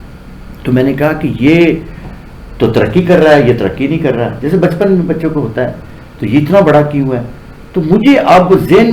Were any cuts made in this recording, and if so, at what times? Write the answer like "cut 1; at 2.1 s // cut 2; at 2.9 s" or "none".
none